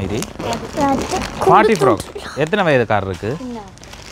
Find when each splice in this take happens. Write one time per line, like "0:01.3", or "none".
none

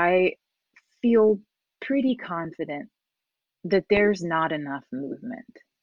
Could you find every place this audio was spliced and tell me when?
none

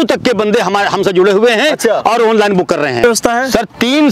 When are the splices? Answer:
0:03.0

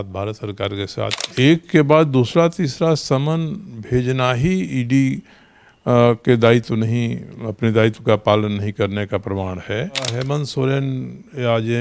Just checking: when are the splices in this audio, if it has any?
0:01.2
0:10.2

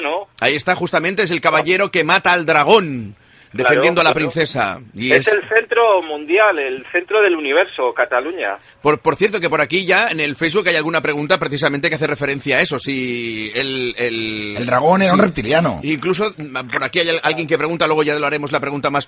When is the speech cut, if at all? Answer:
0:14.1

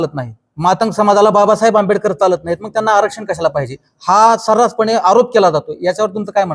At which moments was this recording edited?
none

